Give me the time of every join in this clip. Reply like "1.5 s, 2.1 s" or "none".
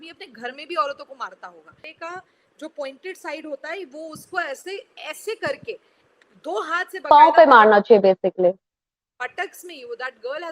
1.9 s